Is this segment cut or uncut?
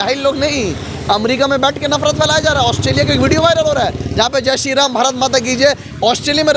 uncut